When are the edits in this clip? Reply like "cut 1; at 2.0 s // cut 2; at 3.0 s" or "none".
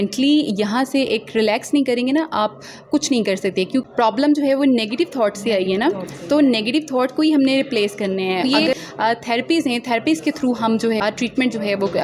cut 1; at 3.9 s // cut 2; at 8.5 s // cut 3; at 11.0 s